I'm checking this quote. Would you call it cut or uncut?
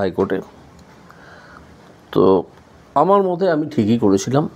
uncut